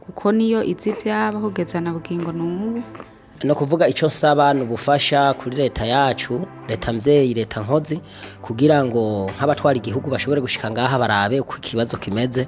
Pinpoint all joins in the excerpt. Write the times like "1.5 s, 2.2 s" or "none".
3.2 s

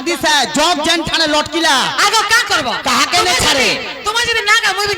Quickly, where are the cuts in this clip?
none

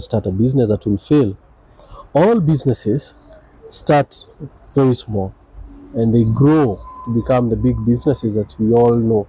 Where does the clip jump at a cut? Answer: 1.5 s

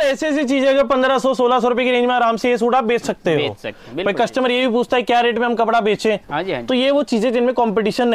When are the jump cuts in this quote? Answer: none

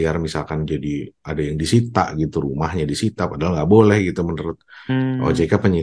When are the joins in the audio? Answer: none

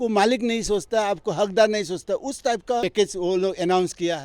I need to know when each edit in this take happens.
2.8 s

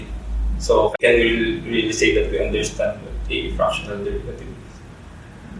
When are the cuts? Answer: 0.9 s

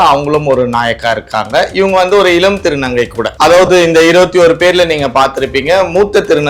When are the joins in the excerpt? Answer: 3.2 s

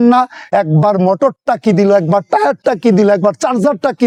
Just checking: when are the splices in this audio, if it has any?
none

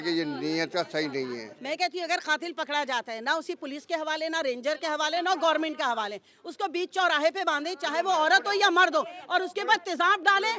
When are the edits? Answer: 1.5 s

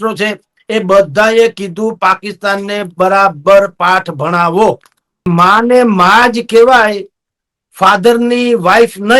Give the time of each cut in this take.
5.3 s

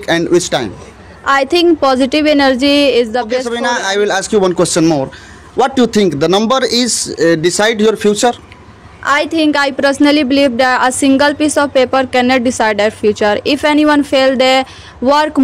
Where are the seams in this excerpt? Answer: 3.5 s

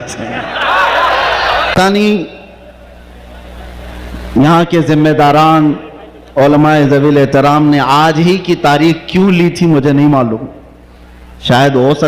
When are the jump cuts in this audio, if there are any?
1.7 s

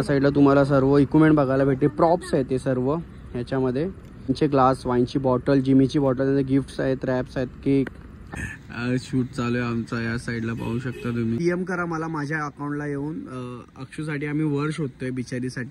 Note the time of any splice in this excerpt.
4.3 s, 8.2 s, 11.4 s

